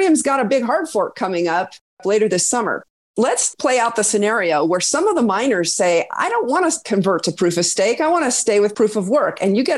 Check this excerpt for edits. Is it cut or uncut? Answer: cut